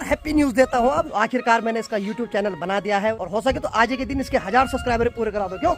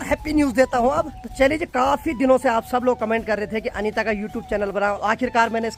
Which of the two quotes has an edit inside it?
first; 2 cuts; at 1.1 s, 3.2 s

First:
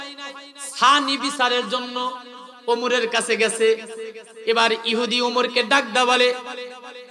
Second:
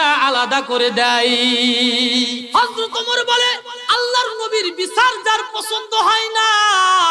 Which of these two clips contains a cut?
second; 2 cuts; at 2.4 s, 3.7 s

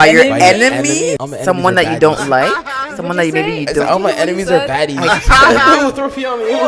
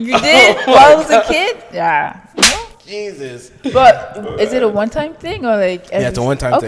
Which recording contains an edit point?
first; 1 cut; at 1.3 s

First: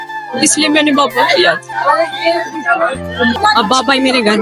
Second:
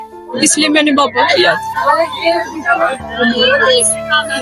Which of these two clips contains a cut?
first; 1 cut; at 3.4 s

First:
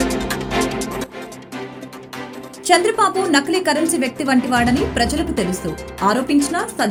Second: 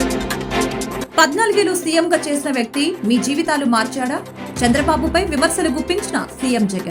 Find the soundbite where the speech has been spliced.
second; 1 cut; at 1.1 s

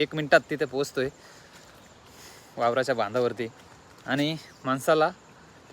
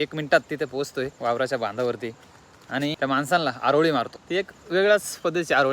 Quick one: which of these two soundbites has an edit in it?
second; 3 cuts; at 1.1 s, 3.0 s, 4.2 s

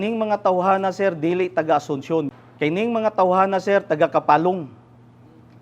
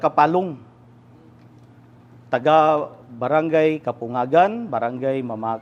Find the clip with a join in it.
first; 1 cut; at 2.3 s

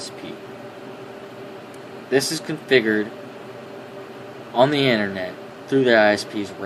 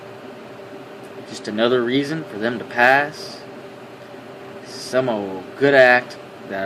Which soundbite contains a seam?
second; 1 cut; at 5.4 s

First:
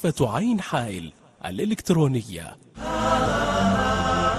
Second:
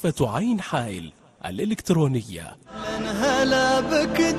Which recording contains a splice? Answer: first; 1 cut; at 2.7 s

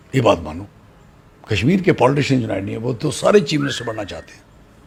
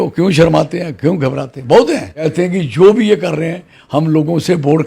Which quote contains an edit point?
second; 1 cut; at 2.3 s

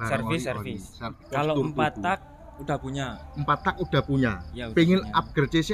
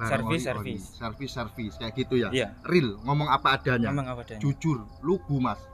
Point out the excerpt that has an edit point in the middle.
first; 1 cut; at 1.2 s

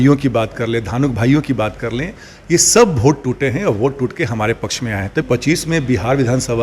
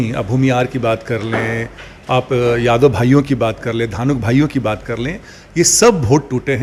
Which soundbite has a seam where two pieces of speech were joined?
first; 1 cut; at 5.2 s

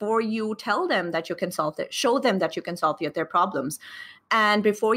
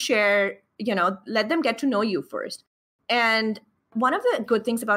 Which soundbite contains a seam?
second; 1 cut; at 3.9 s

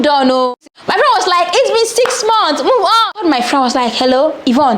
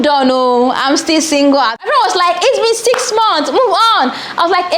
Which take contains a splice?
first; 2 cuts; at 0.8 s, 3.1 s

